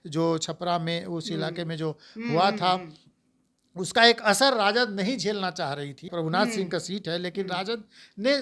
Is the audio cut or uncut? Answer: cut